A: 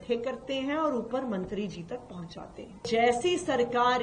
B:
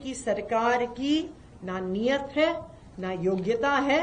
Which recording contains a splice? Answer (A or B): A